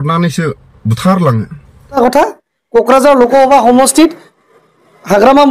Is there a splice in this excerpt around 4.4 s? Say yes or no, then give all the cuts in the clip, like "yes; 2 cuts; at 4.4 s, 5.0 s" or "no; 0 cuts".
no; 1 cut; at 2.0 s